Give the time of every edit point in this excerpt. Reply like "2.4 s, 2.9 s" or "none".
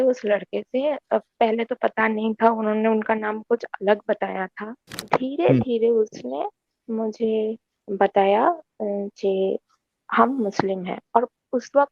5.1 s